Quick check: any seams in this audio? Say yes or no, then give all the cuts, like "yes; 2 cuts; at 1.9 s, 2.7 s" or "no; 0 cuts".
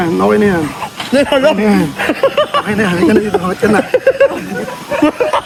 no; 0 cuts